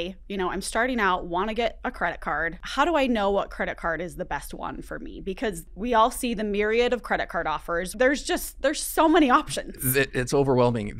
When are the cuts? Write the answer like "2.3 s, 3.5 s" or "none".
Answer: 2.6 s, 5.7 s, 7.9 s

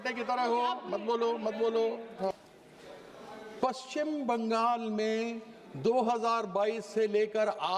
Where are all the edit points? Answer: 2.3 s

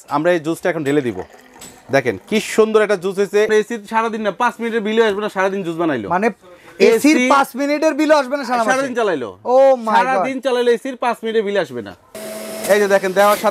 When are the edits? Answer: 3.5 s, 12.1 s

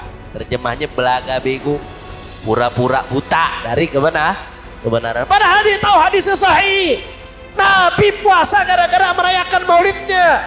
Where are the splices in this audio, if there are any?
none

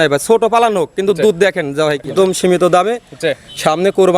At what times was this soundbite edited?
2.1 s

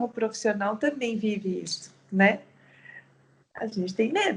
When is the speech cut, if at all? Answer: none

